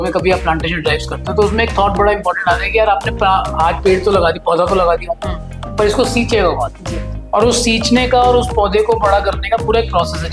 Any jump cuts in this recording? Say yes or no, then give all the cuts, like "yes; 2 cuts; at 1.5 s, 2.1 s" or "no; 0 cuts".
no; 0 cuts